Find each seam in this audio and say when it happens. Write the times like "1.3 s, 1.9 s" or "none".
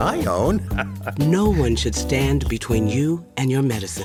none

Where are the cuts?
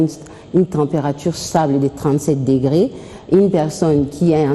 3.1 s

